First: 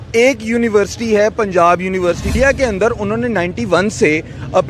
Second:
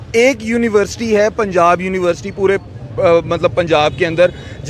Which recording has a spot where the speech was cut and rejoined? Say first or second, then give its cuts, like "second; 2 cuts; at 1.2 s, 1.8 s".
first; 1 cut; at 2.3 s